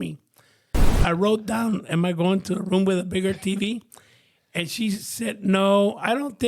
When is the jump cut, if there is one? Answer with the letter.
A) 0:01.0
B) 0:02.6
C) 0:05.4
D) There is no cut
A